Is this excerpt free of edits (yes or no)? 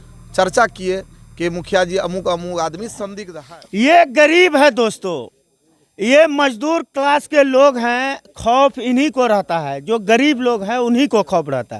no